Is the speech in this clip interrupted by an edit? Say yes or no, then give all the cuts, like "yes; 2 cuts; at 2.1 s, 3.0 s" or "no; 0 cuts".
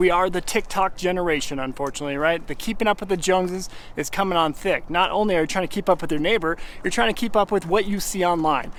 no; 0 cuts